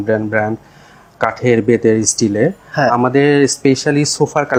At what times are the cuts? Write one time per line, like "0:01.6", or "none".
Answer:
none